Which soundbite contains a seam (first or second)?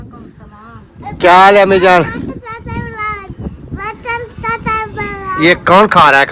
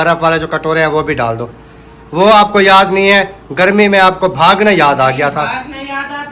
first